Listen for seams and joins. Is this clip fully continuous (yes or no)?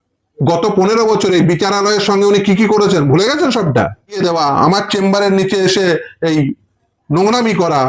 no